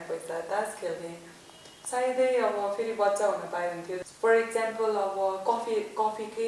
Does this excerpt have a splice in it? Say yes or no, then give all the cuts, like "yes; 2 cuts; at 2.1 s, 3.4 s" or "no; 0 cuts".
yes; 1 cut; at 4.0 s